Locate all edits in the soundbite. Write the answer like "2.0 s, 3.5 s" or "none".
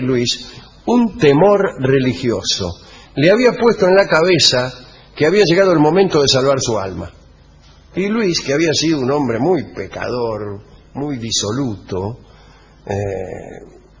1.6 s

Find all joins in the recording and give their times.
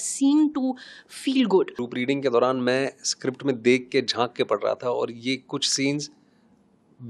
1.8 s

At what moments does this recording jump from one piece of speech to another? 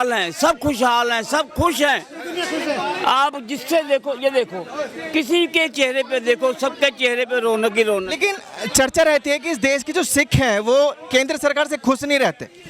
none

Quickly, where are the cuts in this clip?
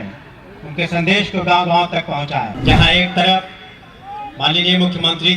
2.6 s

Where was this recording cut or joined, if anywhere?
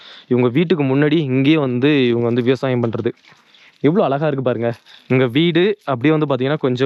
none

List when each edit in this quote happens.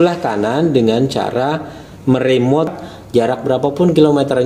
2.7 s

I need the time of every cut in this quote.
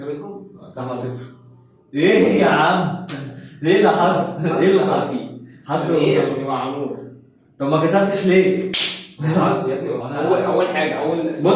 10.0 s

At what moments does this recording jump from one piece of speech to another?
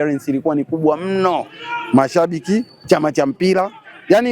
none

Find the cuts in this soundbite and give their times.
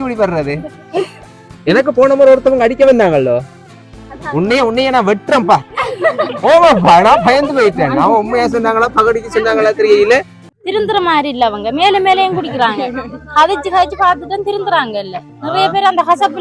10.4 s

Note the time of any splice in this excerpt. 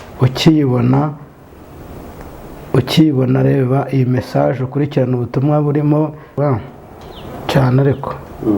6.3 s

